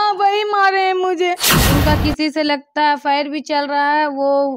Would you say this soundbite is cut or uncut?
cut